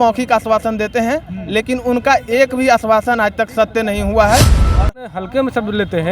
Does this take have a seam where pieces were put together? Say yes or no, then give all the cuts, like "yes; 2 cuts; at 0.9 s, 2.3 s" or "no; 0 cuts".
yes; 1 cut; at 4.7 s